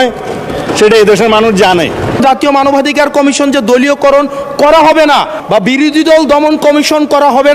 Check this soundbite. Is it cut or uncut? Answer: cut